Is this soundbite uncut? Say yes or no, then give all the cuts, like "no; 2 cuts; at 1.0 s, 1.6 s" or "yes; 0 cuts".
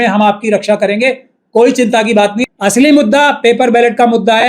no; 1 cut; at 2.4 s